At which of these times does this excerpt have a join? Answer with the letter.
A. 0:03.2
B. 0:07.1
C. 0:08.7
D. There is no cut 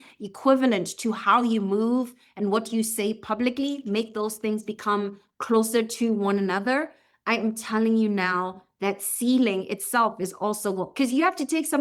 D